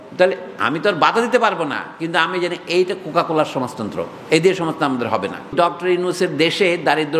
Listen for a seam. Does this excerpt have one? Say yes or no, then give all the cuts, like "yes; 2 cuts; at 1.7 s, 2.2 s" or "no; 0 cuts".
yes; 1 cut; at 5.5 s